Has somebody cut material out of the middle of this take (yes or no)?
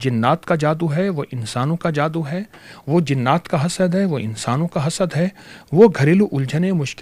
no